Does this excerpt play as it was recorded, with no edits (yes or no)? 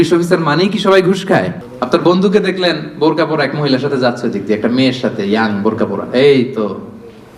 no